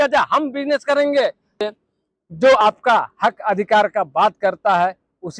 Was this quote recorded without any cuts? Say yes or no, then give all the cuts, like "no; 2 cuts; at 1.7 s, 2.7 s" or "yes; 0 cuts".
no; 1 cut; at 1.5 s